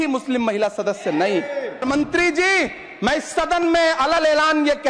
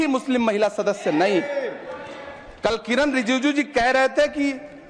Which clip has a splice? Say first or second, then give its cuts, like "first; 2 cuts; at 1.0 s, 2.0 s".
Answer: first; 1 cut; at 1.8 s